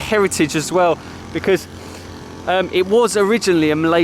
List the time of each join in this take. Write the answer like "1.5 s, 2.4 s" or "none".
none